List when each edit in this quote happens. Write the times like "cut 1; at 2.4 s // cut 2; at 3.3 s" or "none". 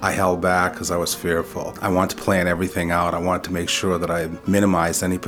cut 1; at 1.7 s // cut 2; at 4.4 s